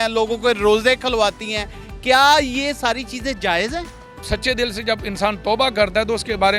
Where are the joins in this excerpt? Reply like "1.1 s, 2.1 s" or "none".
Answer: 4.2 s

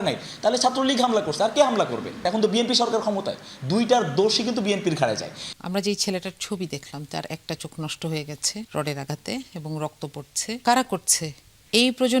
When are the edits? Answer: 2.2 s, 5.5 s, 8.7 s, 10.6 s

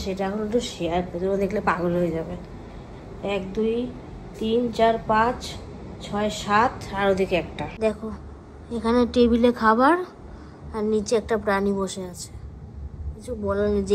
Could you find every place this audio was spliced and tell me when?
7.8 s

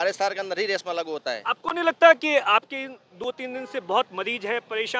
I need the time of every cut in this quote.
none

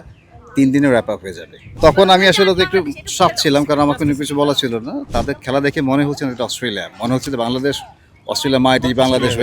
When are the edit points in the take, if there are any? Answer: 1.6 s, 5.1 s

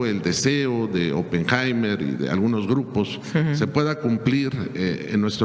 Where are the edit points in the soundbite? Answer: none

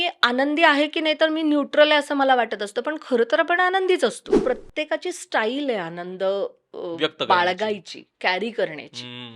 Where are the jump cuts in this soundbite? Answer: 4.4 s

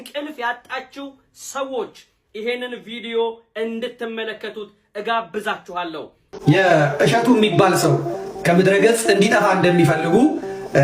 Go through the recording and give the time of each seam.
6.2 s

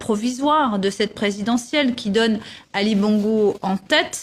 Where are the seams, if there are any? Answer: 2.5 s

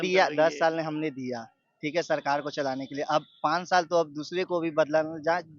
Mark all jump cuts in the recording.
none

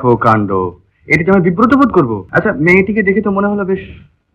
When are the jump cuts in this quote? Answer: 2.2 s

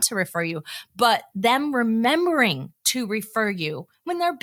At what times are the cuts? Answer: none

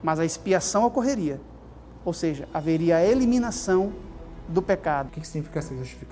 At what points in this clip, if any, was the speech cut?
5.2 s

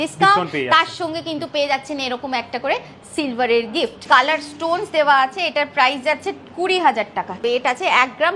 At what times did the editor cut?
4.0 s, 7.4 s

